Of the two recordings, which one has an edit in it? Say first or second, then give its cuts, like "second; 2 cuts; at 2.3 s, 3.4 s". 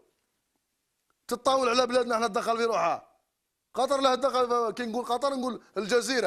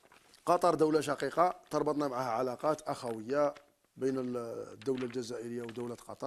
first; 1 cut; at 1.8 s